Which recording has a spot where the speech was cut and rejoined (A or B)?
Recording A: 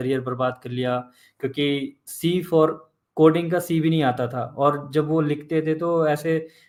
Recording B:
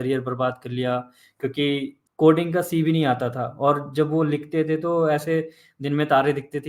B